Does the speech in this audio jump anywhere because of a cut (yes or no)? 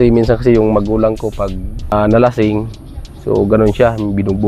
yes